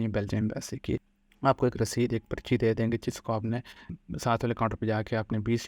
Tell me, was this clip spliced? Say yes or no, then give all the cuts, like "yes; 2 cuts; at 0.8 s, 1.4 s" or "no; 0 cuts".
yes; 1 cut; at 1.2 s